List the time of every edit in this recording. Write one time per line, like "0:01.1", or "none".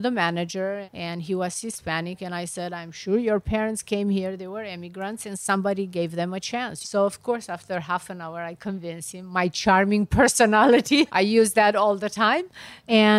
0:06.7
0:11.0